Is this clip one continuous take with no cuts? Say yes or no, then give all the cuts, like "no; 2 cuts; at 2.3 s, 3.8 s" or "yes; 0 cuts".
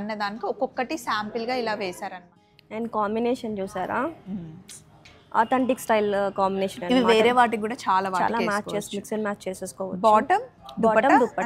no; 1 cut; at 2.3 s